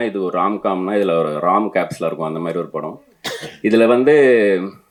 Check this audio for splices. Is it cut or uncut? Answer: uncut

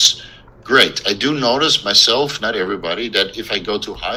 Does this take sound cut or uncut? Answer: uncut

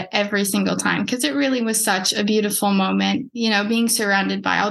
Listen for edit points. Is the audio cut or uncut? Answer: uncut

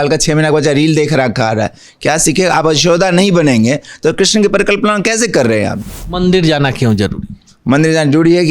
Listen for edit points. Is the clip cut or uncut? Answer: cut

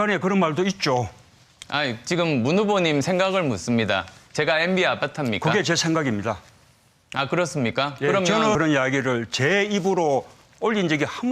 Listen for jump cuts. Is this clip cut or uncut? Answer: cut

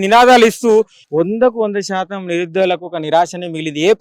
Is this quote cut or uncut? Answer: cut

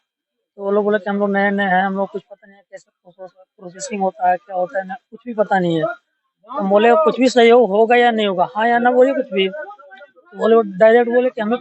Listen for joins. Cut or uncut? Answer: uncut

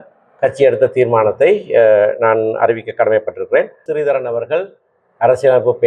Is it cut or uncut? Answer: cut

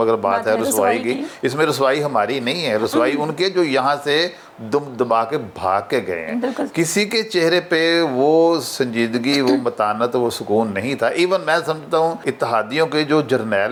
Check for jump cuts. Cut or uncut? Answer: uncut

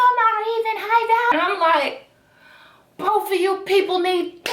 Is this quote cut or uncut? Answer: cut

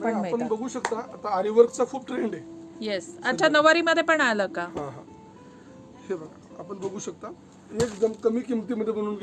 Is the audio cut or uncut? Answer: uncut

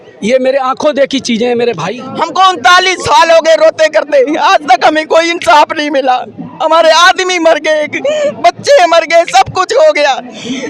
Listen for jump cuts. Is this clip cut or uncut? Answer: cut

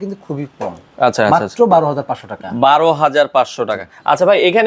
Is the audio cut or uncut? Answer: uncut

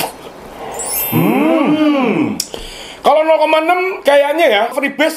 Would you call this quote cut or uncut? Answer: uncut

